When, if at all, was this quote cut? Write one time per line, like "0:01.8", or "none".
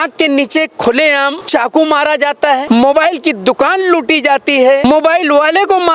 0:01.4
0:02.6
0:04.8